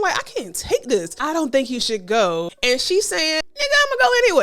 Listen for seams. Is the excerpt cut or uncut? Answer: cut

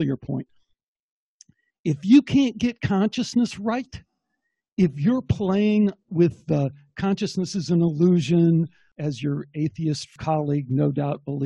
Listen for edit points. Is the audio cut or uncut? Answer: cut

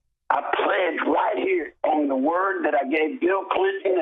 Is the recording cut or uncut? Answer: uncut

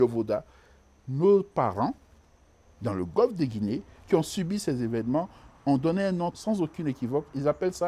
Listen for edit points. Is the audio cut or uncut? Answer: cut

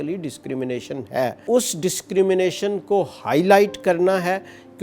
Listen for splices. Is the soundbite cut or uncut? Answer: cut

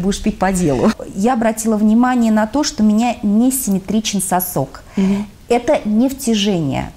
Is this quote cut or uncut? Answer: cut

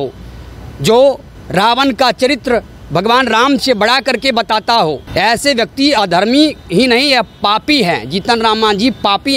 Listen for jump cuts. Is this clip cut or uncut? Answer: cut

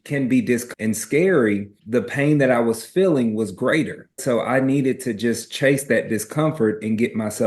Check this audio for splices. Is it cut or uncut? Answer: uncut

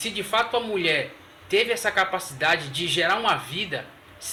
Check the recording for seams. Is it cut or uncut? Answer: uncut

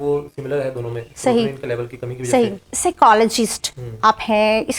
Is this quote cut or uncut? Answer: cut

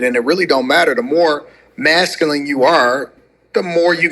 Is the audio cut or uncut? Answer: uncut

